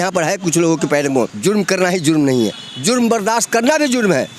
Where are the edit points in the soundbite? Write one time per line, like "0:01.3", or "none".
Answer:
0:01.3